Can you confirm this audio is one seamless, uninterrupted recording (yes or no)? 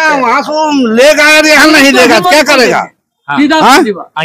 yes